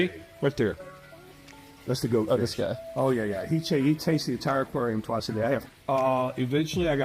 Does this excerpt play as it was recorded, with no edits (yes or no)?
no